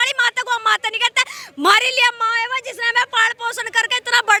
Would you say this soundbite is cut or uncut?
uncut